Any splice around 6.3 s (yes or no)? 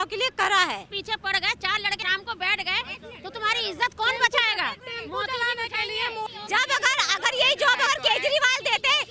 yes